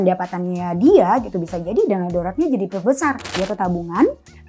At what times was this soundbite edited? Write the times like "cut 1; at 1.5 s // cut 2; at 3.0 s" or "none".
cut 1; at 3.3 s